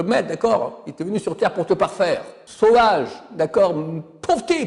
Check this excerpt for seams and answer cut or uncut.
cut